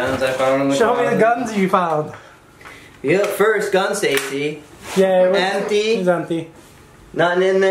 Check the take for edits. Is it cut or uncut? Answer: uncut